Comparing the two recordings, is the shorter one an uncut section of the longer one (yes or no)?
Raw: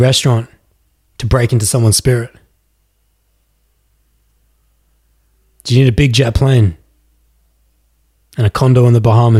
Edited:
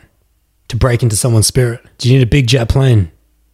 no